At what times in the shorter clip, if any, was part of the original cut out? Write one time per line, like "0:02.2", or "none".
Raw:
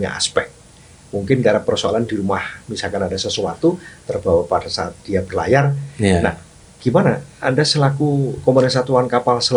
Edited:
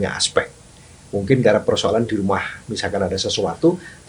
none